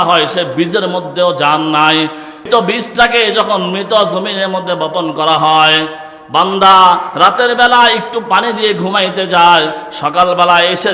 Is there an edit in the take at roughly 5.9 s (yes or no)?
no